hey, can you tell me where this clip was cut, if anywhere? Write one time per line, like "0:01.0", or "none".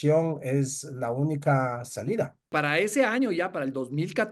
0:02.5